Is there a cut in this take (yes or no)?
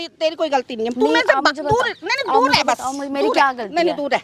no